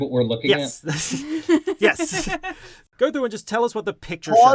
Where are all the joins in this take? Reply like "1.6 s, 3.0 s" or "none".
2.8 s